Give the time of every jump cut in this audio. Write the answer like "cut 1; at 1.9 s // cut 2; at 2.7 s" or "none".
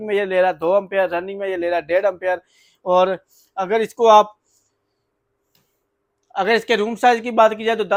none